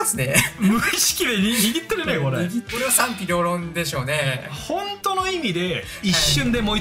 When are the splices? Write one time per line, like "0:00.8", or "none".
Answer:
0:02.7